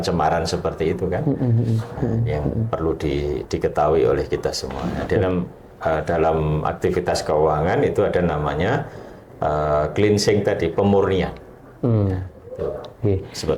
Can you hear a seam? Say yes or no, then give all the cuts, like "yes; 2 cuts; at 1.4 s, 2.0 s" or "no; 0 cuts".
no; 0 cuts